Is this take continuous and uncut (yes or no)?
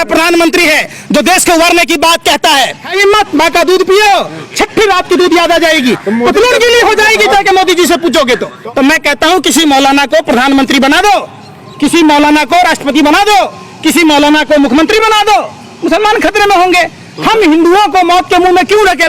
no